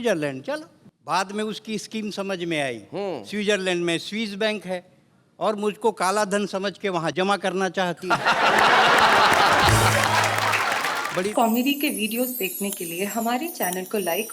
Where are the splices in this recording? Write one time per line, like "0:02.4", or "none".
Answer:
0:11.3